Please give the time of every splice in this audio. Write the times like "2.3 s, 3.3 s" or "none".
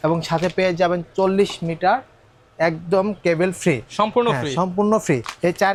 none